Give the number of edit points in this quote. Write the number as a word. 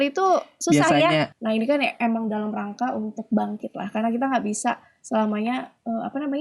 one